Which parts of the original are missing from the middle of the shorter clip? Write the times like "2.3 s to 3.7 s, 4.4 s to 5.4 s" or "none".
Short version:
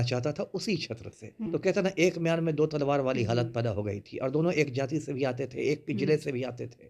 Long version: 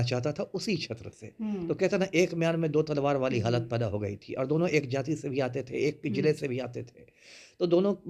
1.5 s to 1.6 s